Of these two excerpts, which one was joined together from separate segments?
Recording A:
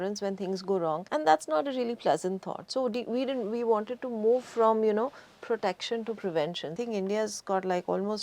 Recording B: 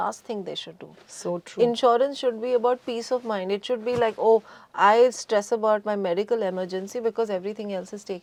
A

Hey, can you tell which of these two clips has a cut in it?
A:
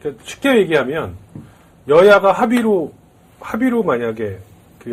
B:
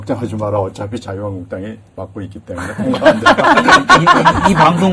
B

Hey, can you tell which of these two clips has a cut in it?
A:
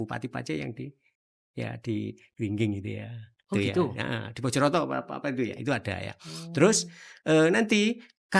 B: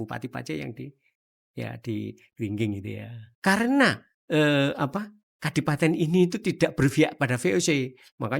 B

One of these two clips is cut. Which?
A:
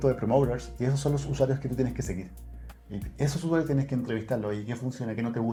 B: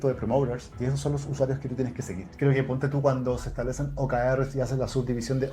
B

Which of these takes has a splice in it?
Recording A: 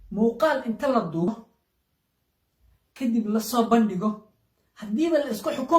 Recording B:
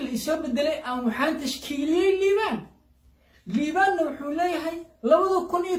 A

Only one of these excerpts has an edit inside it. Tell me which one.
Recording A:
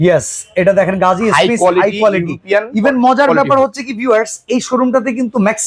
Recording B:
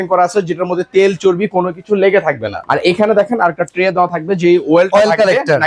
B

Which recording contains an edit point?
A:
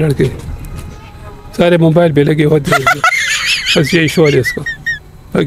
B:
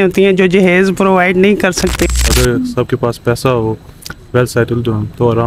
B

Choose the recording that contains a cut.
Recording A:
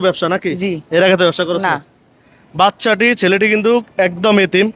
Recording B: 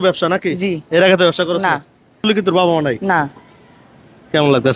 B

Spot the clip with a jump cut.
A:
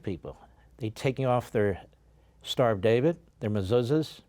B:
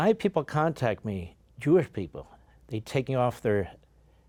A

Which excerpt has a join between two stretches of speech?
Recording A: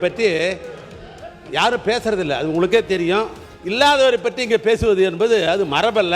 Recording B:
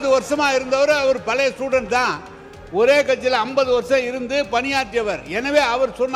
A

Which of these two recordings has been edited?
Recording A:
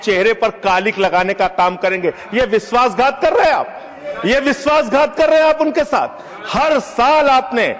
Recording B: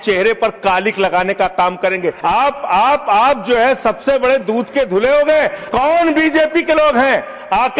B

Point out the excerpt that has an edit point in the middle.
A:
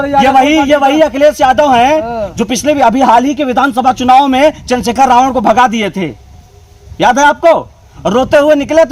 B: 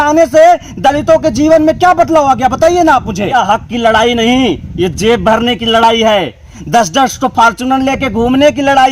B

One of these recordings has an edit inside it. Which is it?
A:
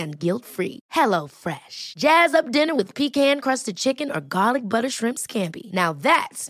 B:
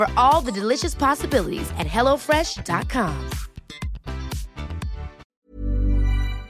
B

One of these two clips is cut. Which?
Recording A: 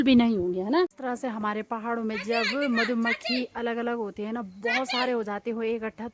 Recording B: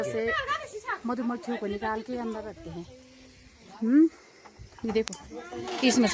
A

